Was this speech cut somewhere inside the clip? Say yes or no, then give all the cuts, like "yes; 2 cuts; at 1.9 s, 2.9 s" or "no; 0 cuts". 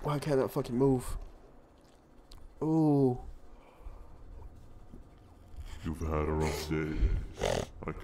no; 0 cuts